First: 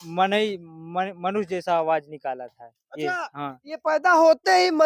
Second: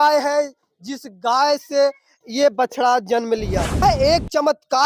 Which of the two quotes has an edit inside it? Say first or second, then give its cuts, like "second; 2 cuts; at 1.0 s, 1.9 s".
second; 1 cut; at 3.8 s